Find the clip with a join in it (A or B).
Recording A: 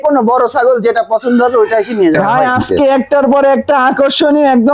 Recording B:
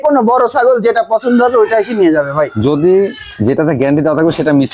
A